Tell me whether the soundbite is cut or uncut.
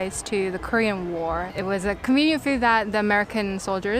cut